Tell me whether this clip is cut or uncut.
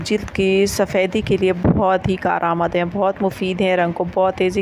uncut